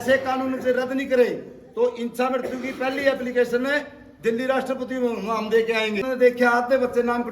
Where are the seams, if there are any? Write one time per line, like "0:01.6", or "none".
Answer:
0:06.1